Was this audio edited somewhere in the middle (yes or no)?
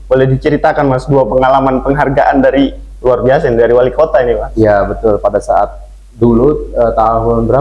no